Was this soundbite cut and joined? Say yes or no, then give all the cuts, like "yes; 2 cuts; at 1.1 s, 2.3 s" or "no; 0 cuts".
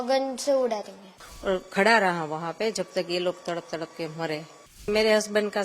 yes; 2 cuts; at 1.2 s, 4.9 s